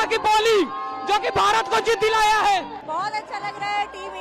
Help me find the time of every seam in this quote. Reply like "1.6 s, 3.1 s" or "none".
2.8 s

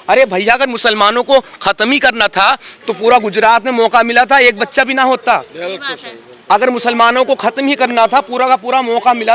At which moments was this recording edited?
none

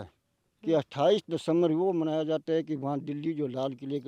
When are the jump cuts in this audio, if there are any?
none

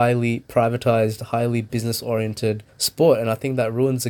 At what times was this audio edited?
2.8 s

